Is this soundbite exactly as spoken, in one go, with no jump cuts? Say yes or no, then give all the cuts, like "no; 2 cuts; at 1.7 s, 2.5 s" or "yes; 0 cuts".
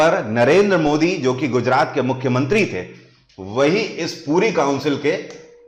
yes; 0 cuts